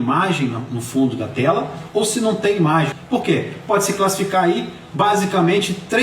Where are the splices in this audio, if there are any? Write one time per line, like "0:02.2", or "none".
0:03.0